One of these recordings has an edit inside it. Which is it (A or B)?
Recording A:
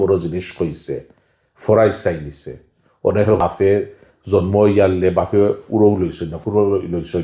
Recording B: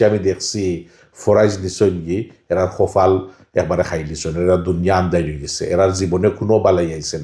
A